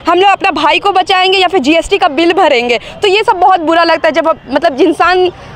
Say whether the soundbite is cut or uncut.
uncut